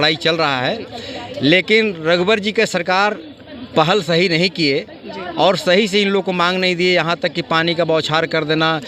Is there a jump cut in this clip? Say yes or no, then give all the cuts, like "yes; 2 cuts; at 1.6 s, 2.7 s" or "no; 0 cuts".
no; 0 cuts